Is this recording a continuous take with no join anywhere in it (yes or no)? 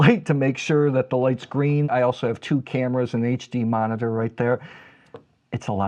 no